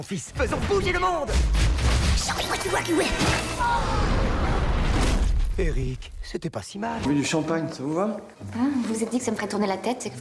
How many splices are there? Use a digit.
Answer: 1